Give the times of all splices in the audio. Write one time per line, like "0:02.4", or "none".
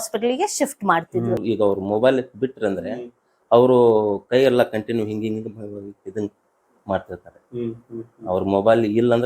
0:01.4